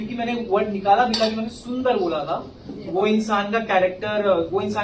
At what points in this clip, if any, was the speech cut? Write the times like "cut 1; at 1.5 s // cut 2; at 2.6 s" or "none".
cut 1; at 2.8 s